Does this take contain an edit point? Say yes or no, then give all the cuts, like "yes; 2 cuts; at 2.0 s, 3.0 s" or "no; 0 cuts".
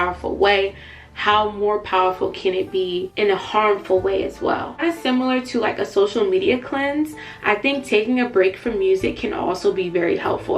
yes; 2 cuts; at 3.1 s, 4.8 s